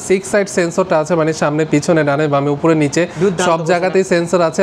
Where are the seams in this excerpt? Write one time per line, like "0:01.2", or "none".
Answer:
none